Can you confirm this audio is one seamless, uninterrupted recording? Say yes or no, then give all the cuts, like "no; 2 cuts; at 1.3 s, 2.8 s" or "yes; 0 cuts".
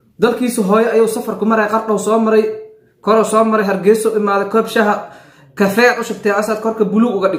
yes; 0 cuts